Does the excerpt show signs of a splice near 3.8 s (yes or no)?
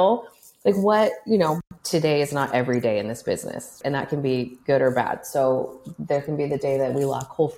yes